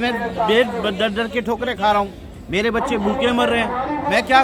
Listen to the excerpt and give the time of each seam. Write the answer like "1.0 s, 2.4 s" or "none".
none